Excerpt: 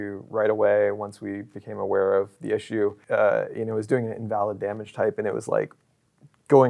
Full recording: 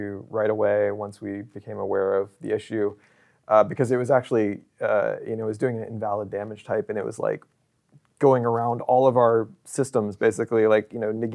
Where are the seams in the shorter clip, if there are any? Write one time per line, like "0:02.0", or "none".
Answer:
0:03.0